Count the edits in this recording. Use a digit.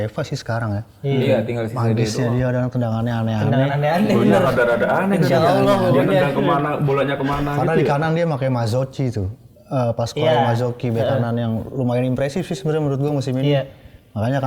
0